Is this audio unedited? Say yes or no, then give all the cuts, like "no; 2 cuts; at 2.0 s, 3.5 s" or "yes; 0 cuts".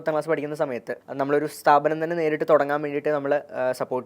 no; 1 cut; at 1.0 s